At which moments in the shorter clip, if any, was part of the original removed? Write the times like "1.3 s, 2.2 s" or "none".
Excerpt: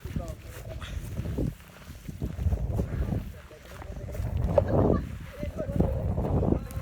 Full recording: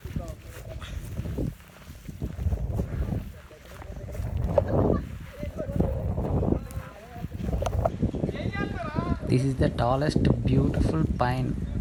none